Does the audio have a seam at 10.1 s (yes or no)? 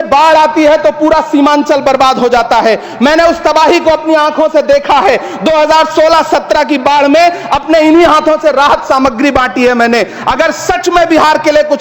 no